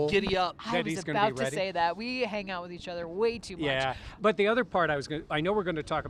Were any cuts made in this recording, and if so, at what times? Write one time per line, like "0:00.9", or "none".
none